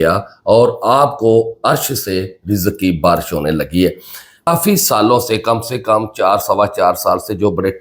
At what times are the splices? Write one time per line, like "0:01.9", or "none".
0:04.5